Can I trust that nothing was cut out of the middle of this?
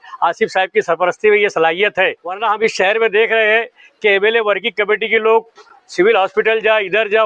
no; 1 cut; at 2.3 s

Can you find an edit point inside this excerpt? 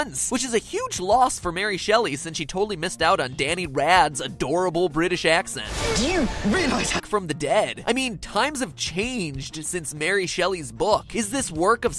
no; 0 cuts

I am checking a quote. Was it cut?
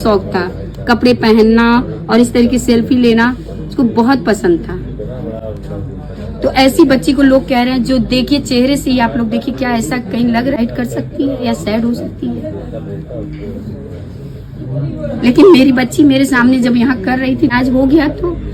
no; 0 cuts

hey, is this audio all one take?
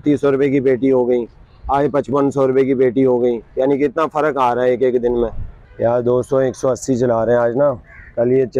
yes; 0 cuts

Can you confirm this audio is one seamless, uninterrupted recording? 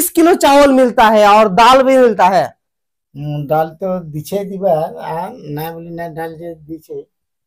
yes; 0 cuts

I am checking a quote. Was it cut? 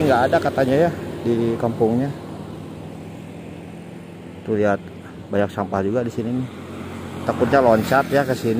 no; 0 cuts

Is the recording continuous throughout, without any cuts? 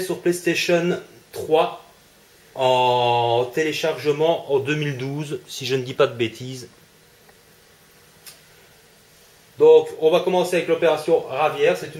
yes; 0 cuts

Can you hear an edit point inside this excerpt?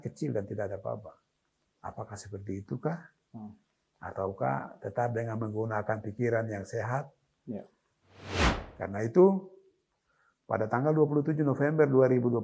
yes; 1 cut; at 8.2 s

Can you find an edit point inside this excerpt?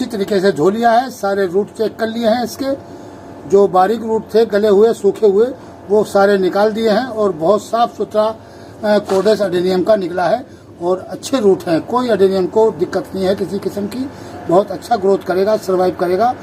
no; 0 cuts

